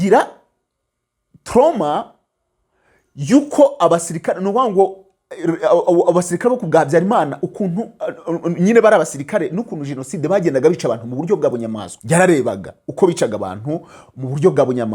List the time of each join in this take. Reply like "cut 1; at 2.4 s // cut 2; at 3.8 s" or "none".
cut 1; at 11.9 s